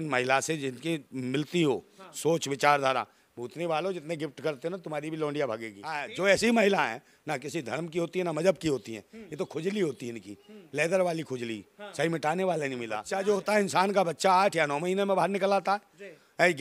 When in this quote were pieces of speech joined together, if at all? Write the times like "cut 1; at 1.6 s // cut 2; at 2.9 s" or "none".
cut 1; at 6.1 s // cut 2; at 13.0 s